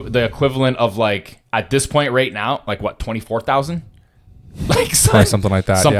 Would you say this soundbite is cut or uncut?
uncut